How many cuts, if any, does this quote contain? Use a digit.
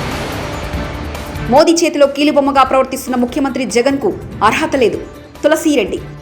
1